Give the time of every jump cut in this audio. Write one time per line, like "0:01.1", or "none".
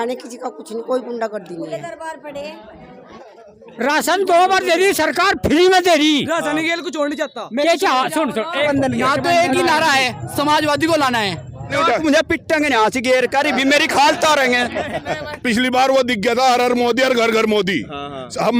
0:03.1
0:08.6
0:11.7
0:15.3